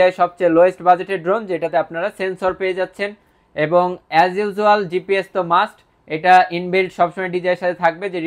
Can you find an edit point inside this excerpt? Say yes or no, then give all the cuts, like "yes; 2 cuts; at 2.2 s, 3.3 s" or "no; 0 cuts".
no; 0 cuts